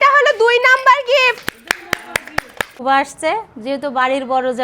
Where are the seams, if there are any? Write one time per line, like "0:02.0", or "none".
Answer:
0:02.8